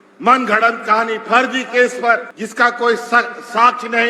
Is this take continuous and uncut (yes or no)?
no